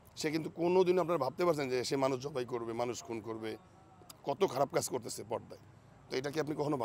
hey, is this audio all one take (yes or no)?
yes